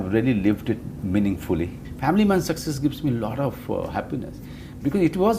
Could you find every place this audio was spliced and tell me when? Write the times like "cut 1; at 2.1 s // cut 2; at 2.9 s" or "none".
cut 1; at 1.8 s